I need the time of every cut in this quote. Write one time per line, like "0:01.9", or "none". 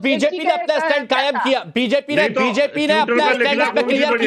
none